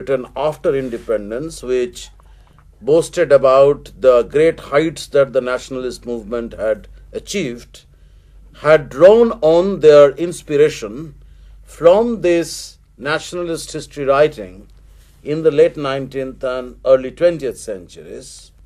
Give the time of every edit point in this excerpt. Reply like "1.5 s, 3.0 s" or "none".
3.7 s